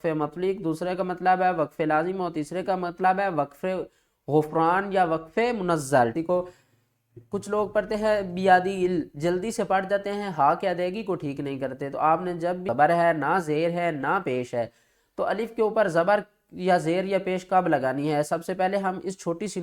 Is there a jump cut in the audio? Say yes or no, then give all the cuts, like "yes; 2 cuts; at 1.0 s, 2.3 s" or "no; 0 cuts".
yes; 3 cuts; at 6.1 s, 11.3 s, 12.7 s